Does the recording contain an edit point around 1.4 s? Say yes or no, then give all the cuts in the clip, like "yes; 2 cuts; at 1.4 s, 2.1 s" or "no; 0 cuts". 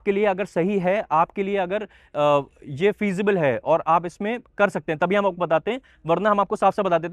no; 0 cuts